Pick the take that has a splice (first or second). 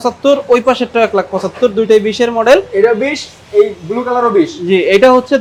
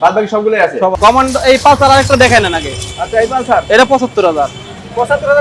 second